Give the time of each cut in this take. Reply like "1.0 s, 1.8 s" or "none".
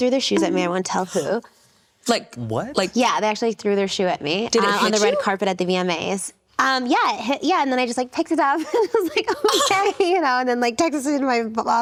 none